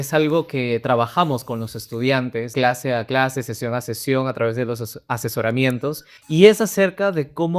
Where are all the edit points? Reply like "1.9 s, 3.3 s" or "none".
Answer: 2.5 s, 6.1 s